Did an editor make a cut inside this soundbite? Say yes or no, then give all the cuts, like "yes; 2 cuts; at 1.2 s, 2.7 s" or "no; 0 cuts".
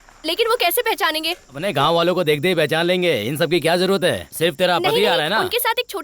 yes; 1 cut; at 1.6 s